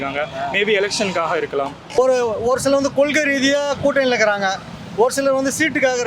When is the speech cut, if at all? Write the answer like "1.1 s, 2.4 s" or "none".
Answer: 2.0 s